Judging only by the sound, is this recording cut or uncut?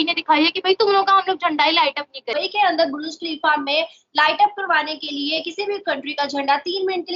cut